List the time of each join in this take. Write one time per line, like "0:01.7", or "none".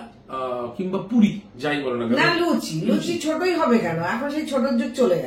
none

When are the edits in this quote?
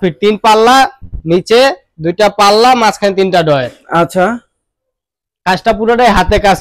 none

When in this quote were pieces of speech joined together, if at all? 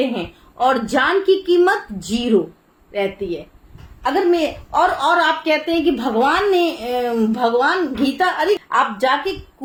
none

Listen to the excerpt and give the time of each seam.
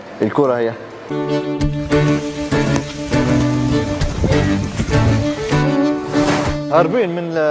0:01.1

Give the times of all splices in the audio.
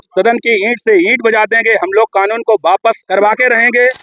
0:03.0

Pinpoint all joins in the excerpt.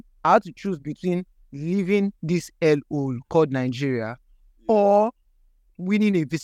none

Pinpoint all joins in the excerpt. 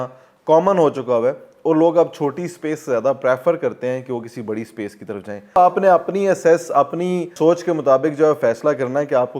0:05.6
0:07.3

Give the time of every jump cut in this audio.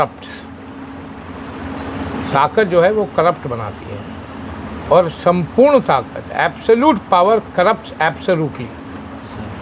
none

